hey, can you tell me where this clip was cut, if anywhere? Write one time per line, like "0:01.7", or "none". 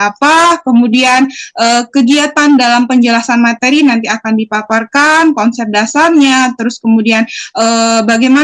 none